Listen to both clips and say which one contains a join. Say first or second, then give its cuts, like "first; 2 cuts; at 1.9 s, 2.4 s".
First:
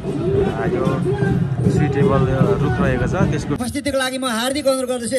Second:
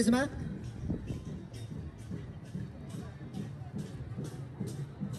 first; 1 cut; at 3.6 s